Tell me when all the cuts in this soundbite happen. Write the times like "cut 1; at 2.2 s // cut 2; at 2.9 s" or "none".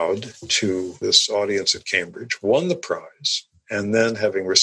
cut 1; at 0.9 s